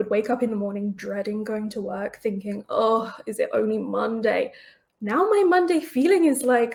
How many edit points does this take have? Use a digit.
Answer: 0